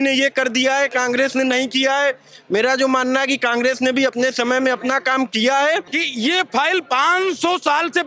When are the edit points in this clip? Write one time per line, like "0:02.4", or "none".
0:06.0